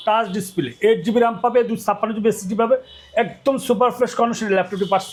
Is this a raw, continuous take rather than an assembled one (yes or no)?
yes